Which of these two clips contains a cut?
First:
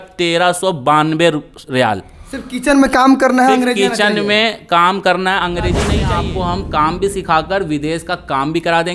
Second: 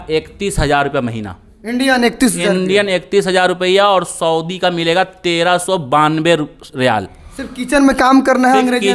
first; 1 cut; at 6.0 s

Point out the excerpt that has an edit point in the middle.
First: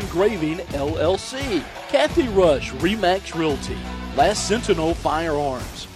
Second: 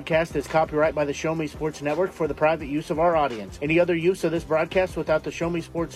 first; 1 cut; at 1.8 s

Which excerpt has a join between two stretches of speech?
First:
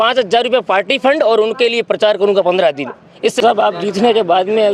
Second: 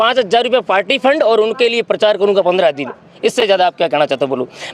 first; 1 cut; at 3.4 s

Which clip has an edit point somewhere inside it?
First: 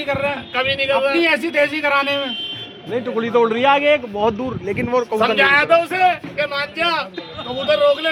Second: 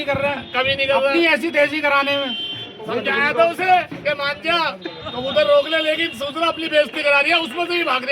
second; 1 cut; at 3.1 s

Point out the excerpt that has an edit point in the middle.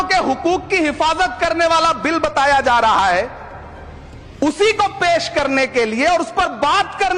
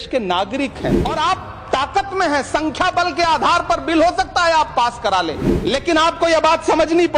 second; 2 cuts; at 1.0 s, 5.5 s

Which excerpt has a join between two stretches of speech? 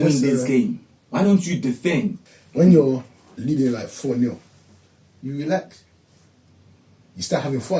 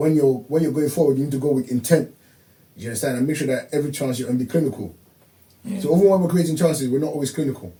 first; 1 cut; at 2.3 s

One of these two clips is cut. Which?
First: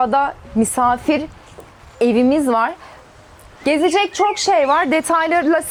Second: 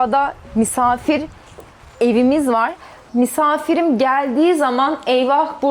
second; 1 cut; at 2.9 s

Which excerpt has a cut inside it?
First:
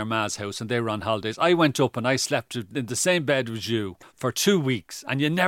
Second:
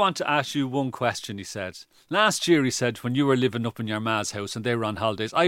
first; 1 cut; at 4.0 s

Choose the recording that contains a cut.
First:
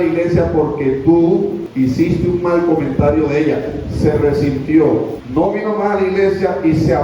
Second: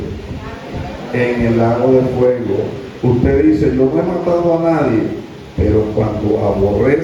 first; 2 cuts; at 1.6 s, 5.2 s

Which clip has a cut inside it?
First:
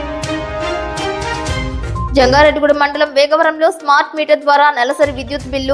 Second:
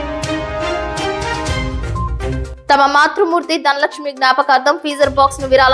first; 1 cut; at 2.1 s

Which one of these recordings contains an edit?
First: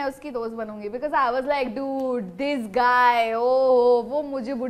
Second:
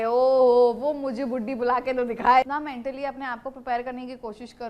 second; 1 cut; at 2.4 s

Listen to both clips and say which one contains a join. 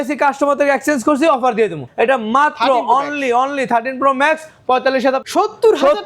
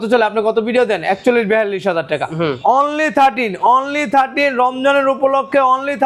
first; 2 cuts; at 1.8 s, 5.2 s

